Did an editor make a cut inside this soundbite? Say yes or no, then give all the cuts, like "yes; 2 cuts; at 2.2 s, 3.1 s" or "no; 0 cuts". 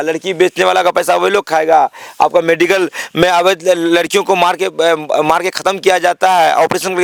no; 0 cuts